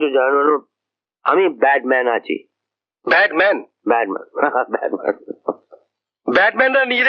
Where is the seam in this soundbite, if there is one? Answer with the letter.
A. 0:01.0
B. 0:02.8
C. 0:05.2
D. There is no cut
D